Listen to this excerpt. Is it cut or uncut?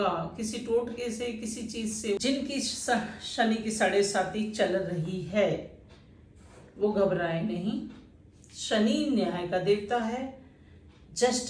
cut